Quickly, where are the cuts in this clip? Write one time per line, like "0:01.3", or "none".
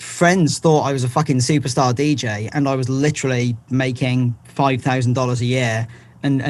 none